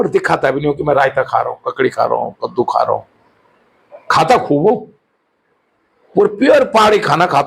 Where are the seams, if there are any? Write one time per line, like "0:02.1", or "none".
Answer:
none